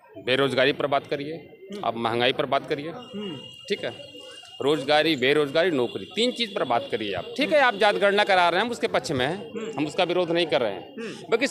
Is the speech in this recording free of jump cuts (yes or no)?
yes